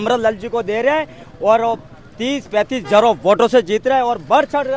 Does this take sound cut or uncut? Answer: uncut